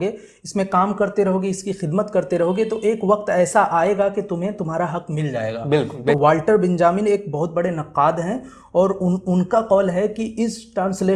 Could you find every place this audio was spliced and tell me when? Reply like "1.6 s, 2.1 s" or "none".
6.2 s